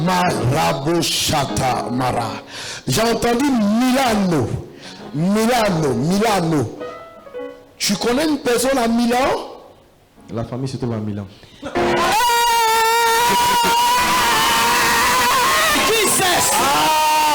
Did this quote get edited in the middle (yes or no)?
yes